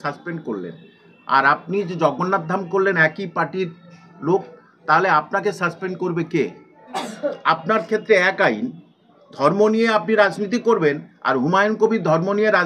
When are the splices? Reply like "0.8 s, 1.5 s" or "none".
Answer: 7.1 s